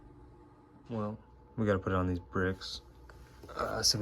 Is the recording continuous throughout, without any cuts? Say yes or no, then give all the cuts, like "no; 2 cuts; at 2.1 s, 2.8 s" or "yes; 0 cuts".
no; 1 cut; at 0.9 s